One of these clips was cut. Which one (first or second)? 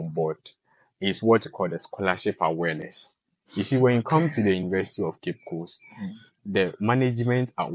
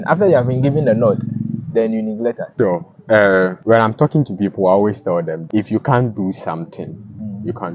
second